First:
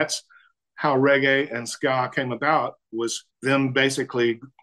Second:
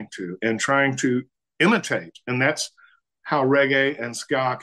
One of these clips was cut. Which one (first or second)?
first